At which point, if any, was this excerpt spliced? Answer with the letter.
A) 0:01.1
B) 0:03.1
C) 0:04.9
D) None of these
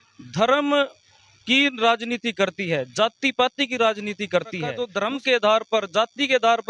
C